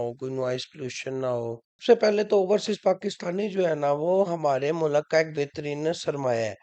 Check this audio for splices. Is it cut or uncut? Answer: cut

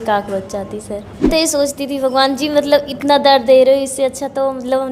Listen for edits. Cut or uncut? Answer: cut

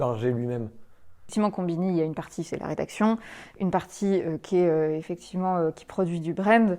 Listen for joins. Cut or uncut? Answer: cut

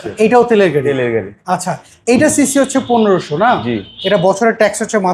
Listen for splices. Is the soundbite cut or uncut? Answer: uncut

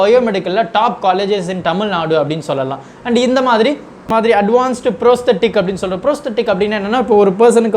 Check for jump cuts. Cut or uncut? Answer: cut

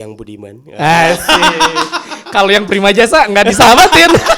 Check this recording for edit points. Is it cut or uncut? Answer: uncut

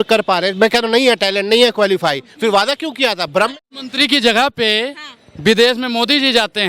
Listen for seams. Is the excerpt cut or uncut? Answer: cut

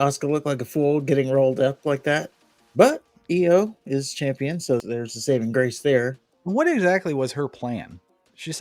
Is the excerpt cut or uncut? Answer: uncut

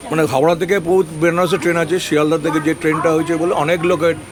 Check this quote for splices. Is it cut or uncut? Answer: uncut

